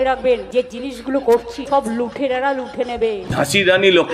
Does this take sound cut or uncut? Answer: cut